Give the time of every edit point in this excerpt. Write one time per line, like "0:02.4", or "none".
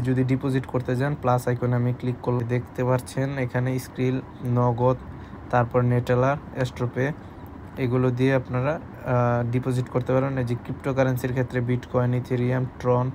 0:02.4